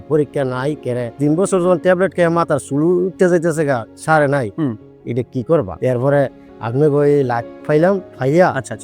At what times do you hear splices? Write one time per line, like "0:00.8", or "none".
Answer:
none

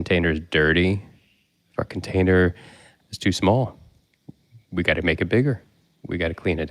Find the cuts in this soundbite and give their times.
0:02.9

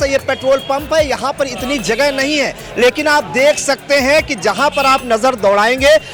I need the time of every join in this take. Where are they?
none

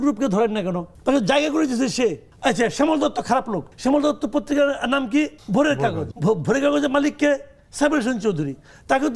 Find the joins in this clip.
0:00.9
0:02.3
0:03.6
0:05.4
0:06.1

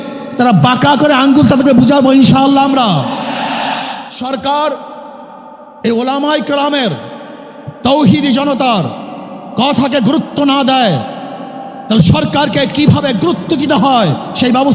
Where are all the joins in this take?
0:04.0

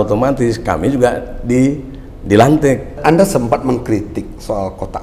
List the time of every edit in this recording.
0:03.0

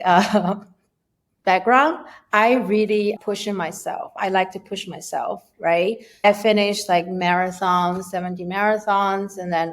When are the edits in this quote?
0:03.2
0:06.2

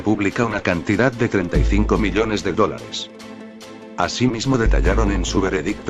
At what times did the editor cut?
none

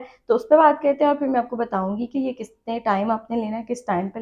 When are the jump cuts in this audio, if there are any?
none

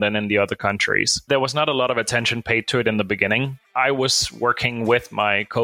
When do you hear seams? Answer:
0:01.2
0:03.7

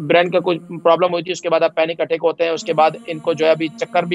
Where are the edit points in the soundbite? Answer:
none

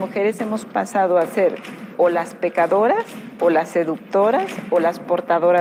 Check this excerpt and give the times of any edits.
none

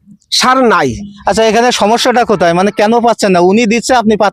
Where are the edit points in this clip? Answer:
none

